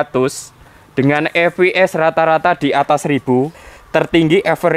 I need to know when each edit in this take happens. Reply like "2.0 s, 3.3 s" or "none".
3.6 s